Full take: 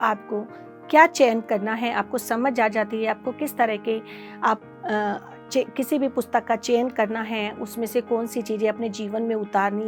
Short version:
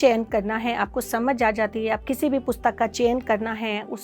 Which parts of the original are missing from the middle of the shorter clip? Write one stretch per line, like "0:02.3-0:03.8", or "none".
0:03.2-0:05.7